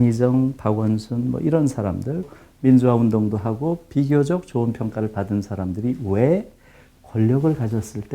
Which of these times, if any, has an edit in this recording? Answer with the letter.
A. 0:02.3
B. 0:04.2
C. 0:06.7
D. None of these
A